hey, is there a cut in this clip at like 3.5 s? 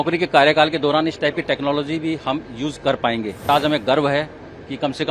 yes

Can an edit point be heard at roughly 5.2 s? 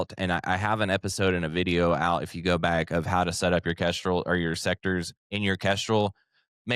yes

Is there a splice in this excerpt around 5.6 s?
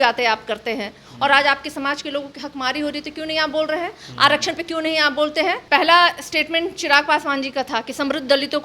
yes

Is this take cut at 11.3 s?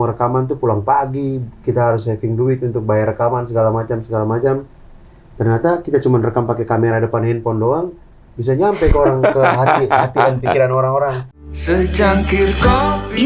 yes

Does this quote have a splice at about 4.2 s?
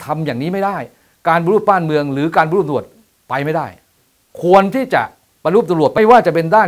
yes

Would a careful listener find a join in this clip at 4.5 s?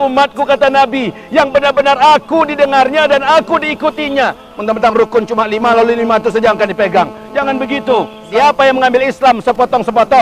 yes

